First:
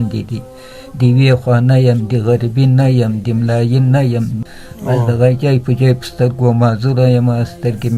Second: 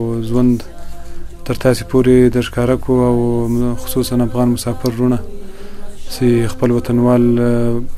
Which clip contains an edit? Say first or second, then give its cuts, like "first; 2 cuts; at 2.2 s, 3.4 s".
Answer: first; 1 cut; at 4.4 s